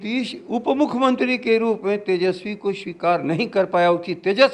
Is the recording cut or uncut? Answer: uncut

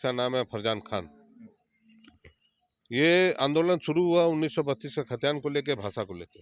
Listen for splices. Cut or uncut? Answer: uncut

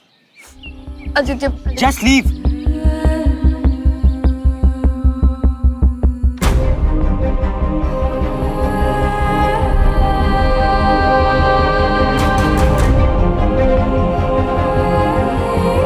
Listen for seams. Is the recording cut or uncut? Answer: uncut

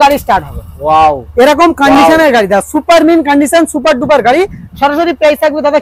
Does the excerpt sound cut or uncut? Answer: uncut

